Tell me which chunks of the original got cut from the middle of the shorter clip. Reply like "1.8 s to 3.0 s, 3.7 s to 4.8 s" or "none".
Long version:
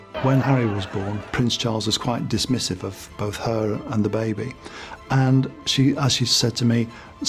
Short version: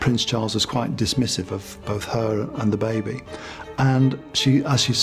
none

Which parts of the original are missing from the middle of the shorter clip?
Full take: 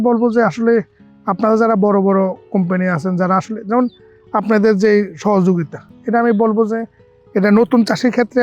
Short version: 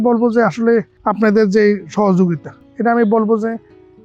0.9 s to 4.2 s

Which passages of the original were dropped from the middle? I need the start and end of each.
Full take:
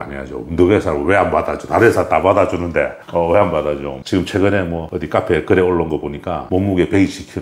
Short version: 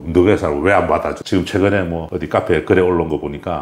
1.6 s to 4.0 s

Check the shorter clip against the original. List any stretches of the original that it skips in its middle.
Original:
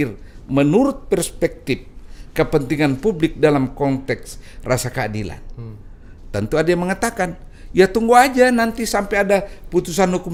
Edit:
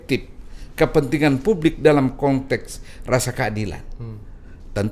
none

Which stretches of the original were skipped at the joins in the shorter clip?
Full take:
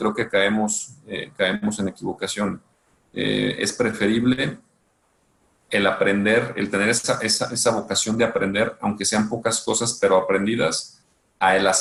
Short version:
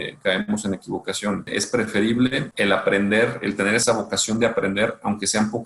2.6 s to 3.6 s, 4.6 s to 5.6 s, 7.0 s to 7.6 s

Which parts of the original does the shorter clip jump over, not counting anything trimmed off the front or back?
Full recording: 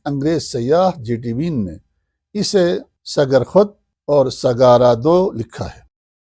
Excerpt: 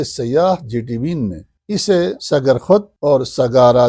2.3 s to 2.8 s, 3.8 s to 4.0 s

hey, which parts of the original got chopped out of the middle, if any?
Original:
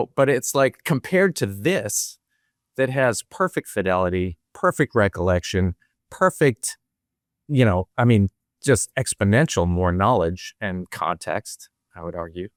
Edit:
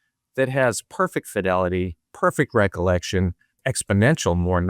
6.0 s to 8.9 s

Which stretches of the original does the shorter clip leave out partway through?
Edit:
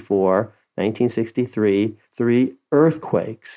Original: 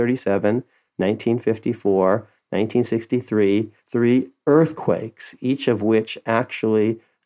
none

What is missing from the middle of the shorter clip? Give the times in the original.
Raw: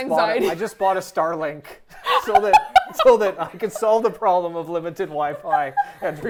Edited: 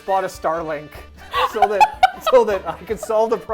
none

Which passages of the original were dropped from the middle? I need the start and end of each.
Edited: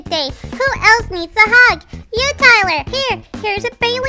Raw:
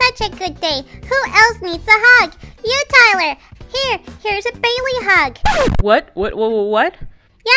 3.4 s to 3.7 s

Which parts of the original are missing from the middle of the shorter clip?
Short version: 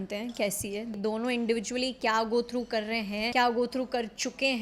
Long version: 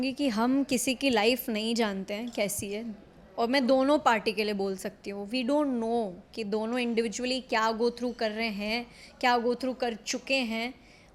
2.9 s to 6.4 s, 8.8 s to 9.2 s

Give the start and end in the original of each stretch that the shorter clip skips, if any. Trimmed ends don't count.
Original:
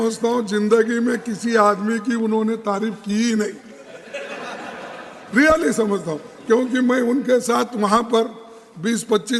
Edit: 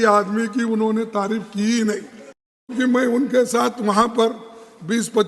4.2 s to 6.7 s

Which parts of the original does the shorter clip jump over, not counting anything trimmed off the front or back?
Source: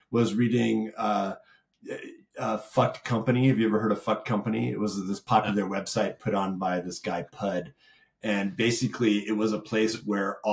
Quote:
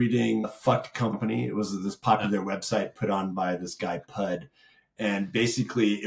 1.3 s to 4.2 s

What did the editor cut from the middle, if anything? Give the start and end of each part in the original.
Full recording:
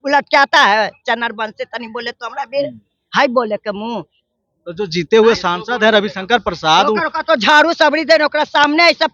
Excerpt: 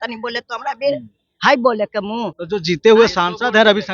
4.1 s to 4.6 s

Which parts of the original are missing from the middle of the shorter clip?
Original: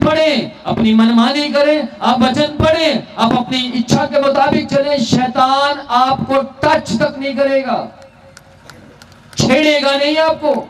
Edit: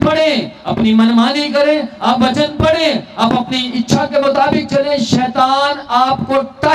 none

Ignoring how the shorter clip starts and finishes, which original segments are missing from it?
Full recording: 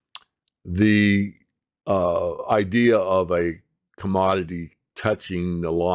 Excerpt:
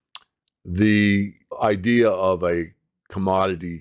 1.5 s to 2.4 s

